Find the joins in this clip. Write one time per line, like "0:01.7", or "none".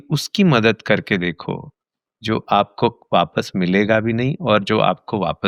none